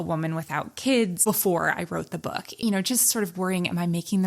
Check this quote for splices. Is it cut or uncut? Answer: cut